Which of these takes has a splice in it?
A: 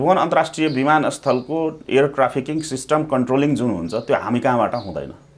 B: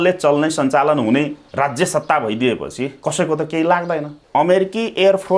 B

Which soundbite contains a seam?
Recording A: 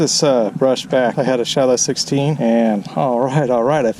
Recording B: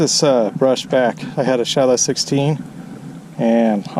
A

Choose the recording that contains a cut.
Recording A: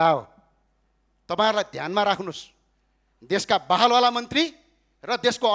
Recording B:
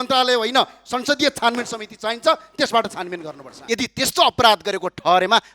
B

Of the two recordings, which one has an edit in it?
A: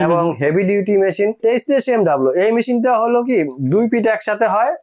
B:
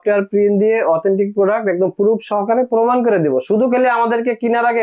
A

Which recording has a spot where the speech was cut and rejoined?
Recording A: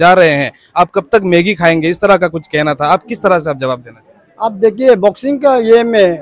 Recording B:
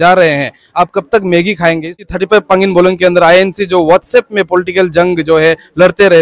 B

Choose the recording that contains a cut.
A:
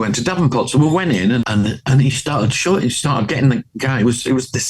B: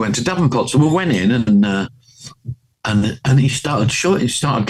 A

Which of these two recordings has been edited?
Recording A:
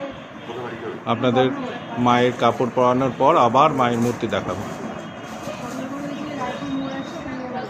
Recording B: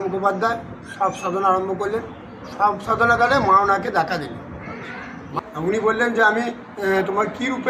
B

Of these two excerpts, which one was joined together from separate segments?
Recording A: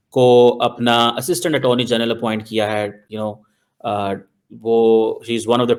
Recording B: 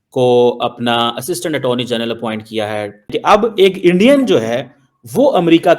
B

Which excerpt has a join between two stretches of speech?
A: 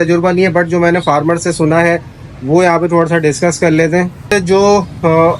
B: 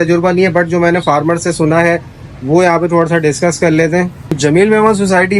A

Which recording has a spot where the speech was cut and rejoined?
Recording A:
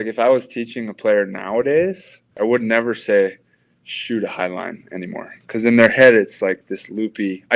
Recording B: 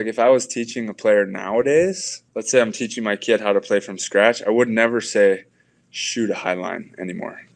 A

